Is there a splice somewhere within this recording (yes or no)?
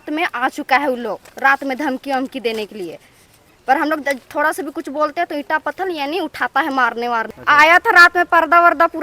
yes